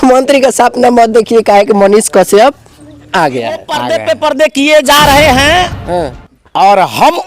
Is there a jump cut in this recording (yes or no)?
yes